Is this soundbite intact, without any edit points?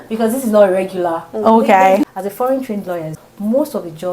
no; 2 cuts; at 2.1 s, 3.2 s

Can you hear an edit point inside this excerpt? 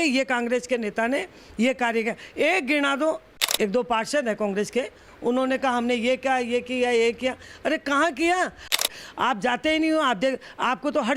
yes; 2 cuts; at 3.3 s, 8.8 s

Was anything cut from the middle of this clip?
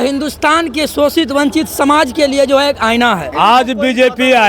yes; 1 cut; at 3.2 s

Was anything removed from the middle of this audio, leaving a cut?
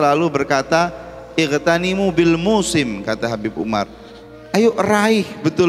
no; 0 cuts

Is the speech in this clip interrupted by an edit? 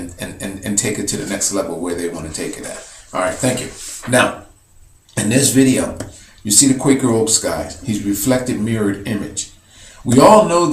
no; 0 cuts

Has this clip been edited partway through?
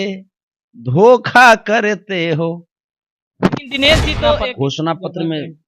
yes; 1 cut; at 4.5 s

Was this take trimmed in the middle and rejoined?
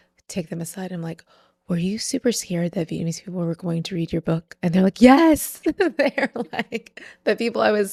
no; 0 cuts

